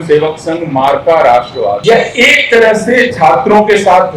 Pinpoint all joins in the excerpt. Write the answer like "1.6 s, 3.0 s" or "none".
1.8 s